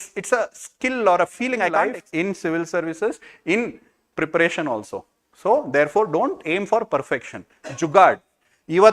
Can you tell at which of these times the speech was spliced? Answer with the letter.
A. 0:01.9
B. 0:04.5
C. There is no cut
A